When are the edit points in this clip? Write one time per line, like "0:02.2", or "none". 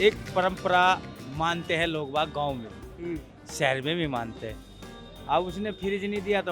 0:01.2